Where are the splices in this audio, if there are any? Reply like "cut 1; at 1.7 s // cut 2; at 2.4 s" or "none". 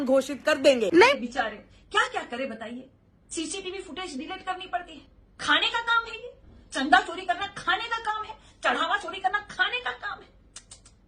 cut 1; at 1.1 s